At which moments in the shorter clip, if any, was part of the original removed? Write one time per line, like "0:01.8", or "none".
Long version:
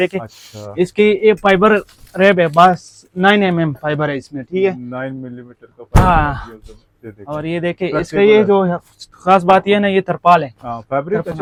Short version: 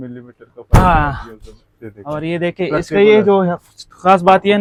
none